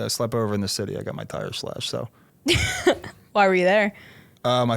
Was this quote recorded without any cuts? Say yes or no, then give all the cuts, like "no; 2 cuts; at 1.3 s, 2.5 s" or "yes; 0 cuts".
no; 1 cut; at 2.2 s